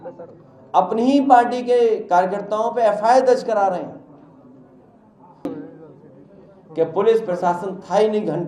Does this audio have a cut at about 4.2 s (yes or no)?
no